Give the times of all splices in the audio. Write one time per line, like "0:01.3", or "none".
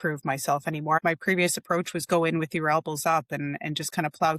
0:01.0